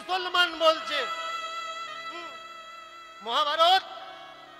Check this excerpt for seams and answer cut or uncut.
uncut